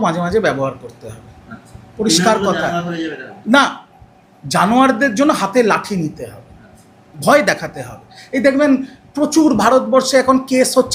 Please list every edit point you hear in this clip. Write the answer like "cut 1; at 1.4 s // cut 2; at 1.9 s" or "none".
none